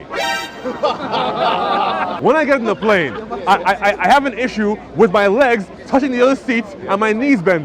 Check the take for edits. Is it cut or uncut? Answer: cut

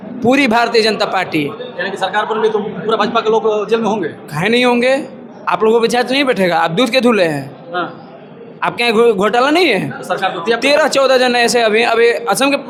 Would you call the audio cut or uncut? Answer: uncut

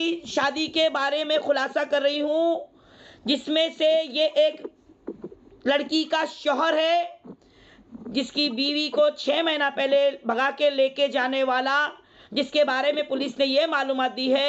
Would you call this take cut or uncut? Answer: uncut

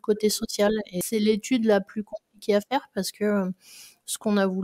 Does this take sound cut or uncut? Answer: cut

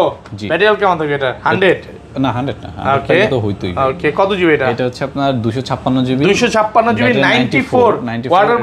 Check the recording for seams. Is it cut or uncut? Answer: uncut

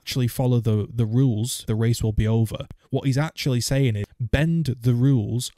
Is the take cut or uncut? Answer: cut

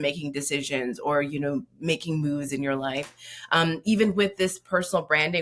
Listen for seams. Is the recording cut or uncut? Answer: uncut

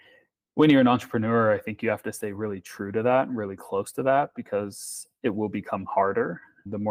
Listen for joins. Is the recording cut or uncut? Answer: uncut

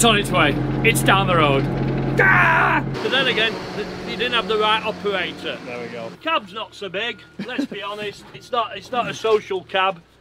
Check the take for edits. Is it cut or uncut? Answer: cut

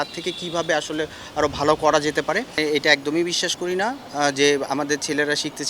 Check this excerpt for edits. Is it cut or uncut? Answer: cut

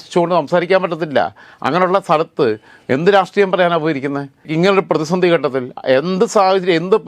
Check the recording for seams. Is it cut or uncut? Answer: uncut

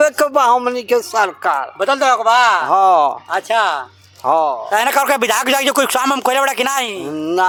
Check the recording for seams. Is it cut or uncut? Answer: uncut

